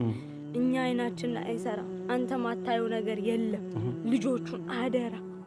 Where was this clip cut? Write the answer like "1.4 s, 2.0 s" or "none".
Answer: none